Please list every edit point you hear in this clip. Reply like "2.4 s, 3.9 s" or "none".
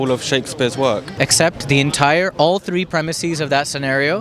1.1 s